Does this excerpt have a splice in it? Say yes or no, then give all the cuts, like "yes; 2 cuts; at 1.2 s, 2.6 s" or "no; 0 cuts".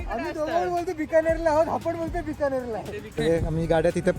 yes; 1 cut; at 3.2 s